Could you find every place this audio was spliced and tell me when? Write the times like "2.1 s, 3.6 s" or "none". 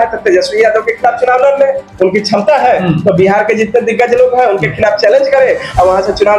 none